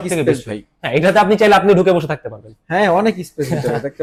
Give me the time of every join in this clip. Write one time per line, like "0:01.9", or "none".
none